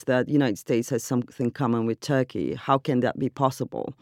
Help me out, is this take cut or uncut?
uncut